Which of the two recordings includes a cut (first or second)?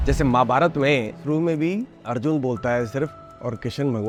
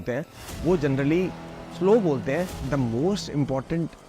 second